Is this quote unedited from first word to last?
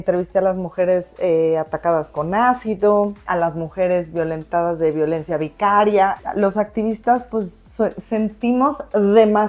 no; 2 cuts; at 3.2 s, 6.2 s

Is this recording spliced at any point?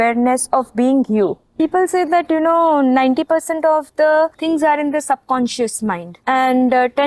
yes; 3 cuts; at 1.5 s, 4.4 s, 6.1 s

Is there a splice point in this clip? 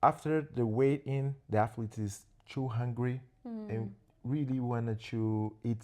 no; 0 cuts

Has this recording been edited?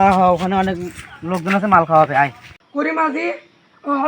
yes; 1 cut; at 2.6 s

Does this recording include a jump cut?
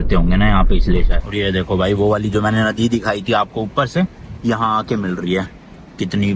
no; 0 cuts

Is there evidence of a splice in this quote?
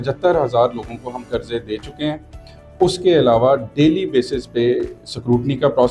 no; 0 cuts

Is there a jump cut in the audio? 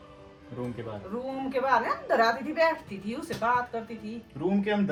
no; 0 cuts

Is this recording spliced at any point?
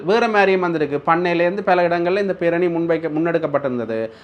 no; 0 cuts

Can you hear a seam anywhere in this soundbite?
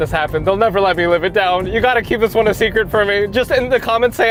no; 0 cuts

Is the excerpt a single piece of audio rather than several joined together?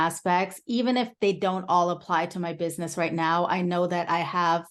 yes; 0 cuts

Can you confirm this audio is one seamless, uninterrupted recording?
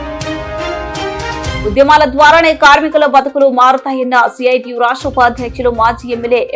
yes; 0 cuts

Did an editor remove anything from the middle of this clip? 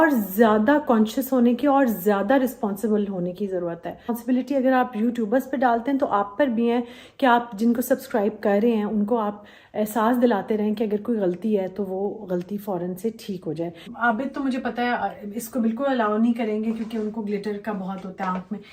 yes; 2 cuts; at 4.1 s, 13.9 s

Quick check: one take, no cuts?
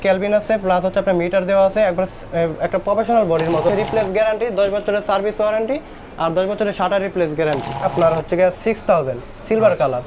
no; 2 cuts; at 3.7 s, 7.8 s

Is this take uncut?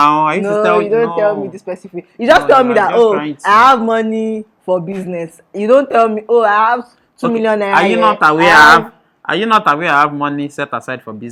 yes; 0 cuts

